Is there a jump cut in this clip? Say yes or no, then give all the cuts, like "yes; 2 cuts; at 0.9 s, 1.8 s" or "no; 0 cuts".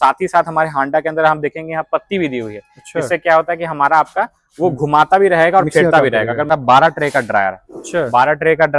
yes; 1 cut; at 6.5 s